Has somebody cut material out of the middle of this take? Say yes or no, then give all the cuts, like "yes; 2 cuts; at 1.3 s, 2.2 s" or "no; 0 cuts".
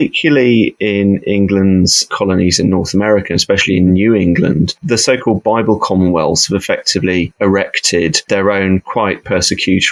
no; 0 cuts